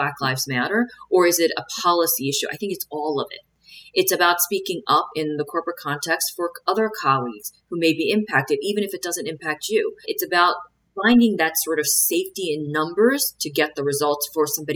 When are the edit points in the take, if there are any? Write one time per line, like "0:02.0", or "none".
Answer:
0:10.1